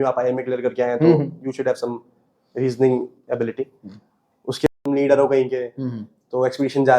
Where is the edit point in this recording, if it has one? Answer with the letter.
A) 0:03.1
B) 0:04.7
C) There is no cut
B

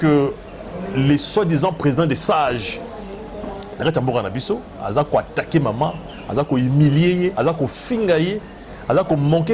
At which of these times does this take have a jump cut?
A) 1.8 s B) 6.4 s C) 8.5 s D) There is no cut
D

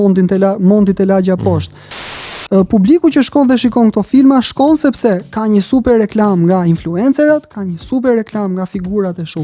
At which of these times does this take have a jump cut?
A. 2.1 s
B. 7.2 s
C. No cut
A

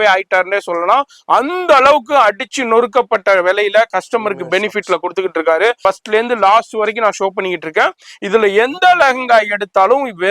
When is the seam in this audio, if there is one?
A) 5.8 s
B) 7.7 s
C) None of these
A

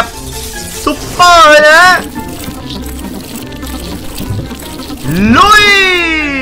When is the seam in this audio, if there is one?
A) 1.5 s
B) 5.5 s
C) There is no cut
C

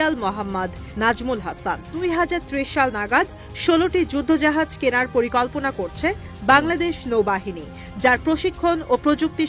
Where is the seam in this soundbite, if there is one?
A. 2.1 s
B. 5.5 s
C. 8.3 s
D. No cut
A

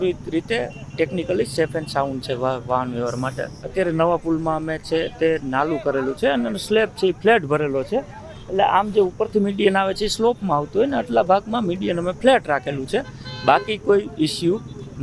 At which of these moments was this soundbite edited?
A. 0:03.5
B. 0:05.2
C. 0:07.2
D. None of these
A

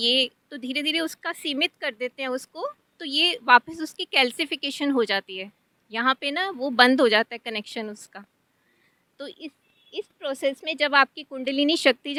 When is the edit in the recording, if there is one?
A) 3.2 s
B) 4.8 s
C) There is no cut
C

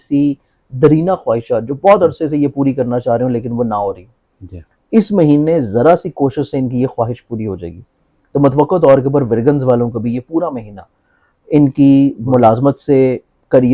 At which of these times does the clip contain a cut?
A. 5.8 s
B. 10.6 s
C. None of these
C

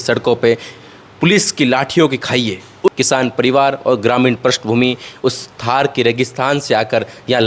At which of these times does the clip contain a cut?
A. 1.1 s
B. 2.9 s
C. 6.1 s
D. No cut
B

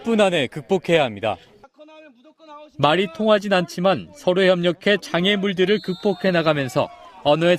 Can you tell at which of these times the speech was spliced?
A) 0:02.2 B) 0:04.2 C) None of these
C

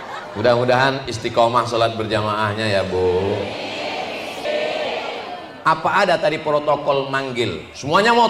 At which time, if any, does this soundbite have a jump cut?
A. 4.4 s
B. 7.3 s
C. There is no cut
A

